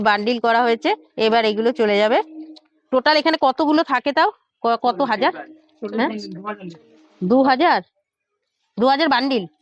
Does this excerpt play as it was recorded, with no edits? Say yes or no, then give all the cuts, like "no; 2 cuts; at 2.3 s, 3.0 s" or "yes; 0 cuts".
yes; 0 cuts